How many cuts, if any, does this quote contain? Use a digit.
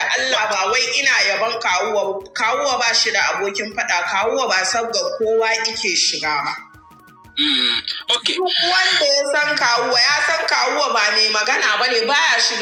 0